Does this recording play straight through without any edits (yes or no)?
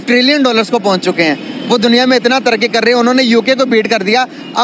yes